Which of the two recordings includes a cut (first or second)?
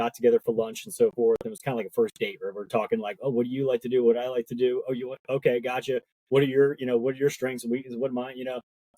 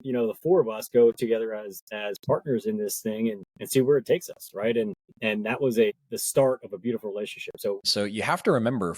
second